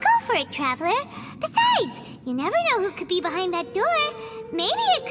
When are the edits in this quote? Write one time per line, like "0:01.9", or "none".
none